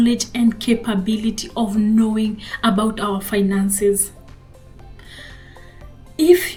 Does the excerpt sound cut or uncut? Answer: uncut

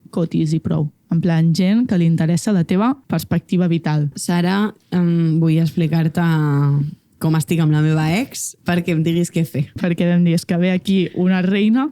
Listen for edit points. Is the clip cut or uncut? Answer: cut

